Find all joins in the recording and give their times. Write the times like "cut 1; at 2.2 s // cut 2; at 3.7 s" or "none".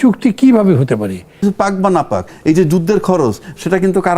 cut 1; at 1.4 s